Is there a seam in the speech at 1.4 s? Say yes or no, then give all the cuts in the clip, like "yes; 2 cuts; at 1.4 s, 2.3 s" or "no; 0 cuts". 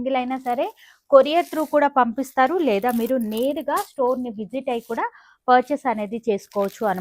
no; 0 cuts